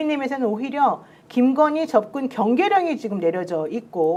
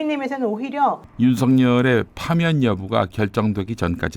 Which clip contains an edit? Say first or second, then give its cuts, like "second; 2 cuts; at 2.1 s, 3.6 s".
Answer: second; 1 cut; at 1.1 s